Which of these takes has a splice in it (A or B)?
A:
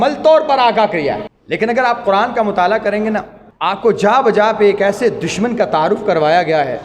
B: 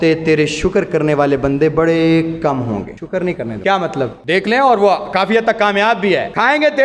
A